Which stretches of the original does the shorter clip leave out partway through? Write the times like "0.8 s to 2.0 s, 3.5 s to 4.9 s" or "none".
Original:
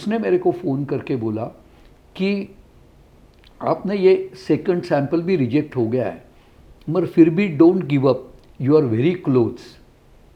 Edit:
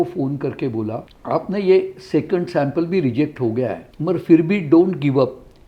1.6 s to 3.4 s, 6.2 s to 6.7 s